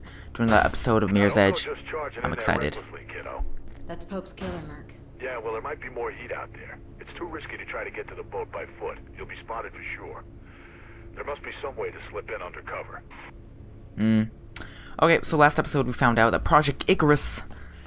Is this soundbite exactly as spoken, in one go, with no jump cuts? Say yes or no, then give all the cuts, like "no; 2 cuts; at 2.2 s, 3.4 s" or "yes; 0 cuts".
no; 1 cut; at 1.7 s